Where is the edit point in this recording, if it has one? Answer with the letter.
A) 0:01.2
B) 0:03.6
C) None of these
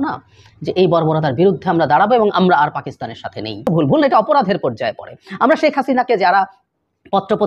B